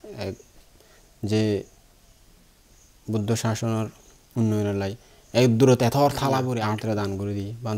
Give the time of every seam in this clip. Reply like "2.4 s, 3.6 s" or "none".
6.5 s